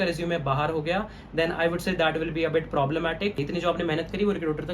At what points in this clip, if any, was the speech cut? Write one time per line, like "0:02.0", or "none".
0:03.4

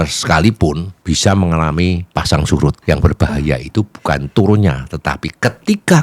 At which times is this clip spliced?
0:00.9
0:02.0
0:02.8

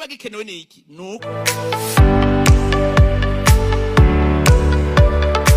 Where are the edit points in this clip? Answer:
0:01.3

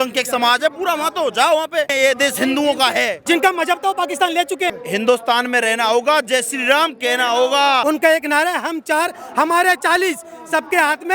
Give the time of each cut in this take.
0:01.9
0:03.2
0:04.8
0:07.8

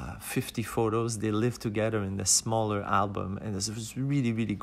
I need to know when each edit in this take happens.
none

